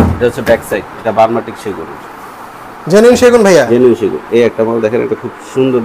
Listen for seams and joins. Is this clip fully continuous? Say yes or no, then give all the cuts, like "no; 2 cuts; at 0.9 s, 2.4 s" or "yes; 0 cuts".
no; 1 cut; at 1.0 s